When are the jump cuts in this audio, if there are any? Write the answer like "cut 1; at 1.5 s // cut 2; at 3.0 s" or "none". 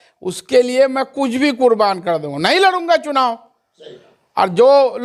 none

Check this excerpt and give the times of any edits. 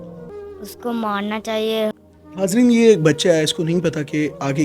cut 1; at 1.9 s

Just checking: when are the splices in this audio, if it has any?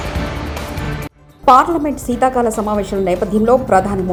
none

